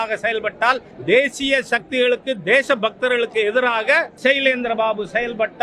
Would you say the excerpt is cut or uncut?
cut